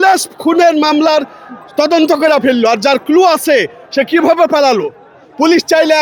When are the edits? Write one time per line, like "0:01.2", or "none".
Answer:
none